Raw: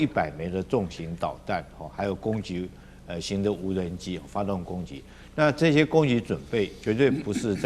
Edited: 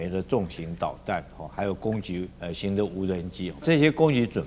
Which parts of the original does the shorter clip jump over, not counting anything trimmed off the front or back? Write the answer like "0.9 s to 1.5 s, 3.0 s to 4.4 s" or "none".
2.8 s to 3.0 s, 4.3 s to 5.6 s